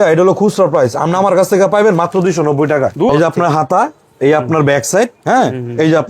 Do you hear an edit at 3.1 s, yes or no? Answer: yes